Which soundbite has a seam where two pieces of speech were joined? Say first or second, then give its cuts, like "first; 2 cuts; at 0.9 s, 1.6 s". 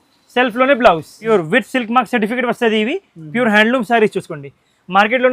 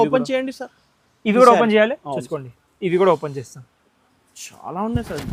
first; 1 cut; at 1.2 s